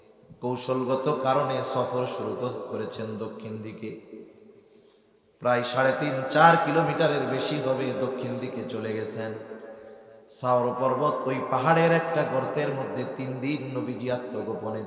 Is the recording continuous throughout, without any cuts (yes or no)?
yes